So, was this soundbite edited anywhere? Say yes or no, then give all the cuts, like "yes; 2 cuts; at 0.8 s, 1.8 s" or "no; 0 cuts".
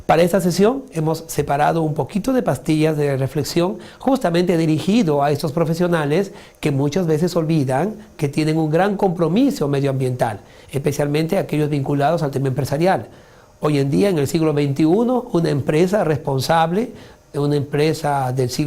yes; 1 cut; at 4.2 s